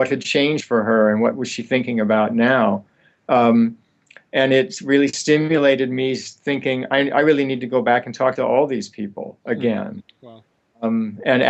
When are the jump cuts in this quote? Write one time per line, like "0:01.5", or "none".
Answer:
0:05.4